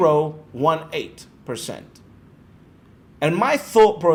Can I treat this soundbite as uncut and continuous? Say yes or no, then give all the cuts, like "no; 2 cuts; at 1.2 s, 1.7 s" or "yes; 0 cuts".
yes; 0 cuts